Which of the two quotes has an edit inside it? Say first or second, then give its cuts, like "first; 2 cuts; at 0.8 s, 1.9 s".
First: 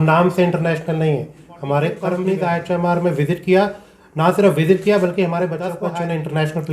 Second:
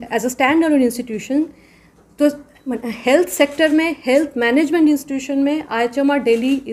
first; 2 cuts; at 2.2 s, 5.8 s